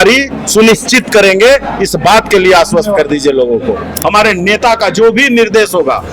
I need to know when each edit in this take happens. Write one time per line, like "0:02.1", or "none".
0:03.9